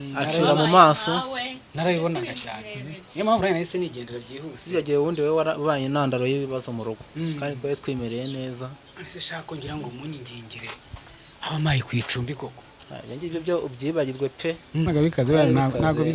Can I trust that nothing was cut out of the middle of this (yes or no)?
no